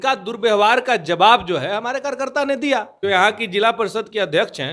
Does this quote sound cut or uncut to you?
cut